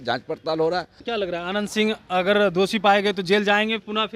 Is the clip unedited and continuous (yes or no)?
no